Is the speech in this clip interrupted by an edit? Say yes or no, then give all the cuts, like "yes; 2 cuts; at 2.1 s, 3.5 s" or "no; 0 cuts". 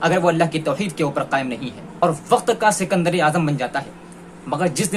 yes; 1 cut; at 1.9 s